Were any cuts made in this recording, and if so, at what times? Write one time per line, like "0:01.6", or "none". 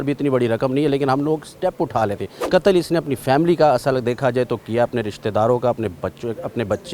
0:02.3

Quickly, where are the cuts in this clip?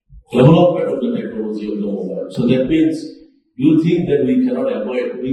none

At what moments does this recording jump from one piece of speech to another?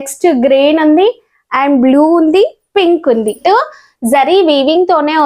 0:03.4

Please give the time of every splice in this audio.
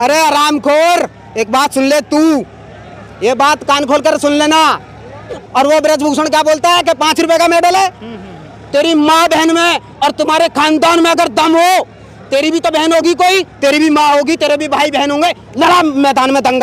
0:05.4

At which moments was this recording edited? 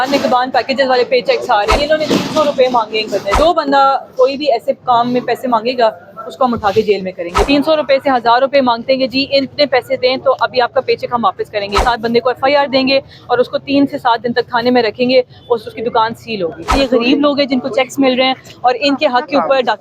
0:01.8
0:03.4
0:07.5
0:11.8
0:16.7

